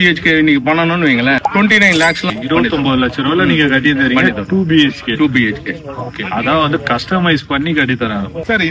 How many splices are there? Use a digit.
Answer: 0